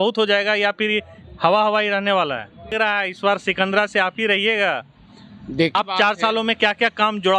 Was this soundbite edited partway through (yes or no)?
yes